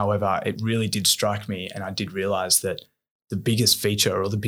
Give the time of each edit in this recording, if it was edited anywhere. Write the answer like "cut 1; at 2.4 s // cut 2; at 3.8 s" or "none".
none